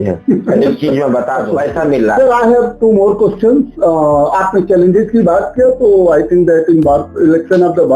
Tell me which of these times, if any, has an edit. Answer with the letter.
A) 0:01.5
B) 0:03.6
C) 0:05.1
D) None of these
A